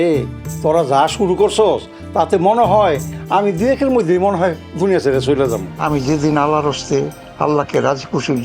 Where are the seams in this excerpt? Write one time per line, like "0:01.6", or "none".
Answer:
0:05.7

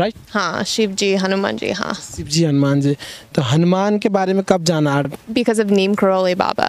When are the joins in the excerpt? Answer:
0:05.1

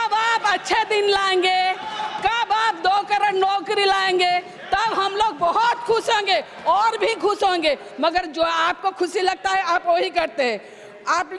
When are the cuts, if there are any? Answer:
none

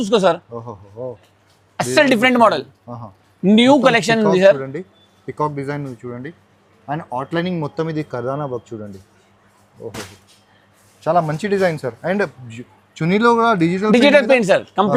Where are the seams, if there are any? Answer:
none

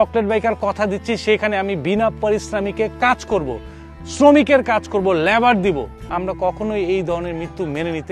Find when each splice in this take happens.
0:06.0

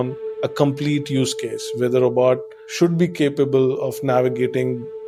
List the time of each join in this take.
none

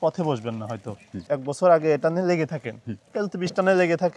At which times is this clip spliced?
0:01.3

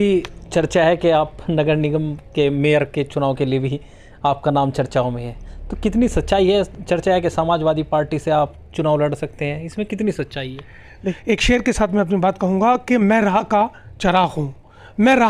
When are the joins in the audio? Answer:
0:11.1

